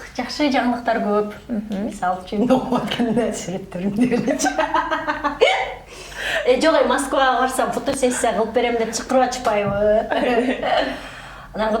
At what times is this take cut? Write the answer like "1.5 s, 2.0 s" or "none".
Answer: none

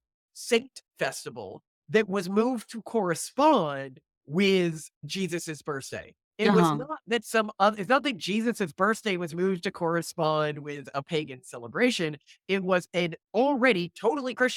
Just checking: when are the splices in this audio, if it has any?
none

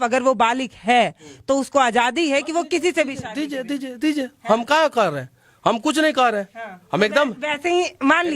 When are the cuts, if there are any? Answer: none

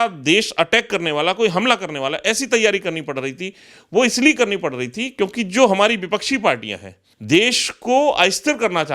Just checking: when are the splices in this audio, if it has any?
6.9 s

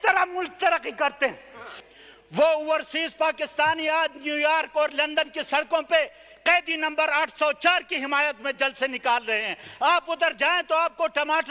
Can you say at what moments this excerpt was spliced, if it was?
1.7 s

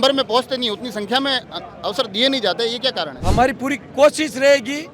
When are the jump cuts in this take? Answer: 3.1 s

